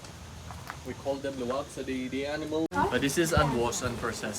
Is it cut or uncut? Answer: cut